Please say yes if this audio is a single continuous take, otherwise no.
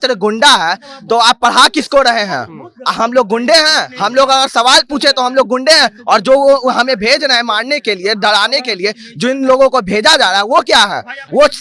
yes